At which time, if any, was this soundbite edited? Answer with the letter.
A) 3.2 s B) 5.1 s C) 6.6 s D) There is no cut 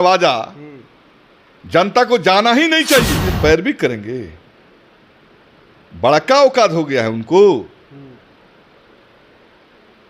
A